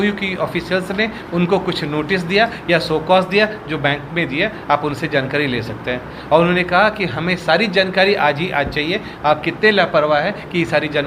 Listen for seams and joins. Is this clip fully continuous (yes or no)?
yes